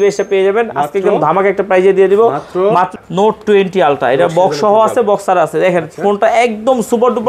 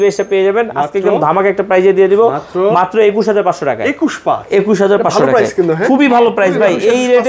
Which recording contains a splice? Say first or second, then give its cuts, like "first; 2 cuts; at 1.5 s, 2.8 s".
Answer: first; 1 cut; at 2.9 s